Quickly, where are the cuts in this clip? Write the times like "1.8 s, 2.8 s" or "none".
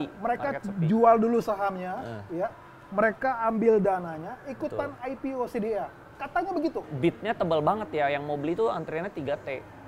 6.9 s